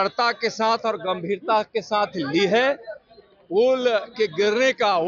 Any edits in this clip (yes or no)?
no